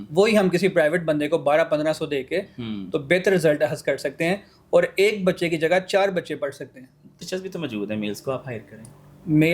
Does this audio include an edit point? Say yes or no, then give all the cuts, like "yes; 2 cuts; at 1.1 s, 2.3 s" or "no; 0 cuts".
yes; 1 cut; at 7.2 s